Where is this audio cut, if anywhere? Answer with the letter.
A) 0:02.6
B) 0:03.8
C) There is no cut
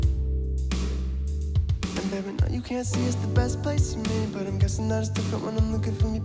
C